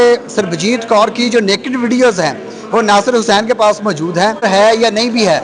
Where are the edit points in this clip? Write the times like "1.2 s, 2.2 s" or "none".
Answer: 4.4 s